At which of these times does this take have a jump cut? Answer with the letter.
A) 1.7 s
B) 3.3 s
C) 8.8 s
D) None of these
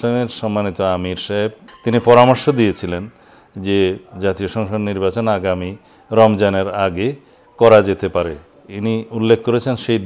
A